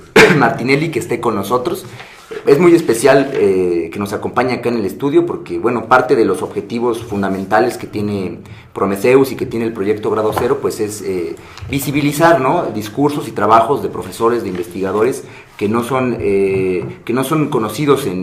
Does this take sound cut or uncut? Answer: cut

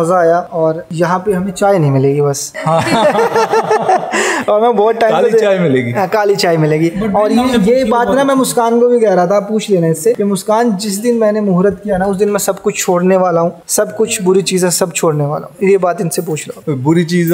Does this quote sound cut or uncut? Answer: uncut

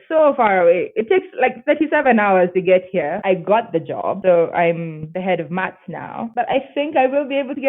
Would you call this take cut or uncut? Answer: cut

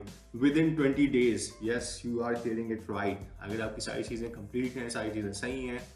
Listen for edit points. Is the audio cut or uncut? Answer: uncut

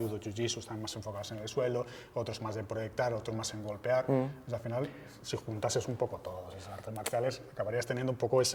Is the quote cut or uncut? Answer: uncut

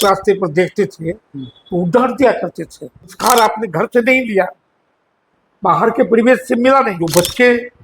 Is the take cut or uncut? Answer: cut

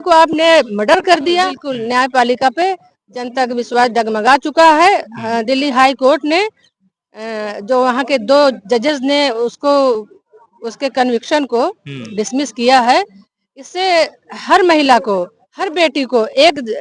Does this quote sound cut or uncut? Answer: cut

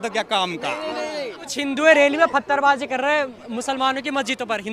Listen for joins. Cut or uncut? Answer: cut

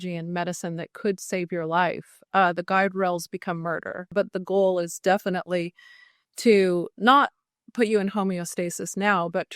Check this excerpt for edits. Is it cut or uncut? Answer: cut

